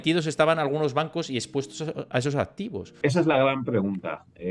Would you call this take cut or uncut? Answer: cut